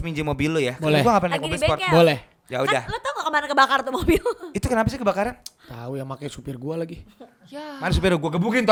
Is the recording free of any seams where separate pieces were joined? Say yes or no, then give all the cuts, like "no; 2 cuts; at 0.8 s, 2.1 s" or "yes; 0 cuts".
yes; 0 cuts